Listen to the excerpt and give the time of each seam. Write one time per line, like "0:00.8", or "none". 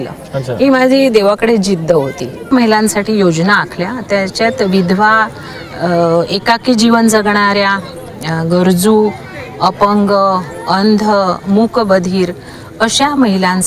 0:02.5

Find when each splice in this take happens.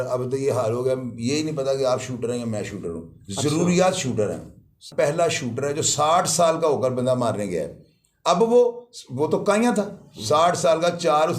0:04.9

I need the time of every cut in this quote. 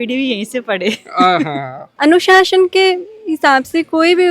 0:01.9

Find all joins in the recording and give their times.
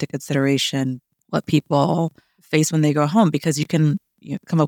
0:01.1
0:02.4

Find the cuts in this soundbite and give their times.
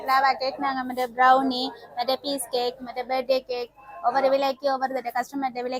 none

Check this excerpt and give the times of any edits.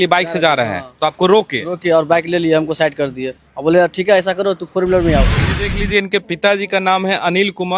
0:05.4

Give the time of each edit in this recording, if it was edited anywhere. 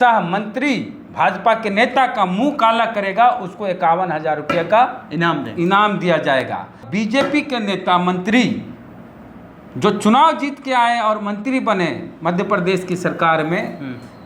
0:06.8

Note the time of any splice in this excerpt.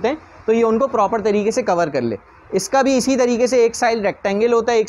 none

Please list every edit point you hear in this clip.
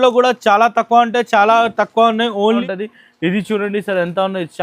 0:02.6

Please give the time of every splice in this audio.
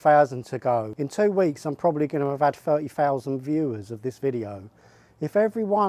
0:01.0

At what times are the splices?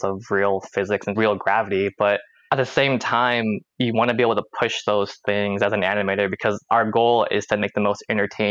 0:01.2
0:02.3

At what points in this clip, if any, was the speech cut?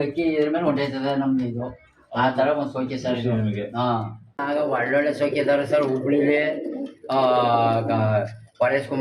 0:04.4

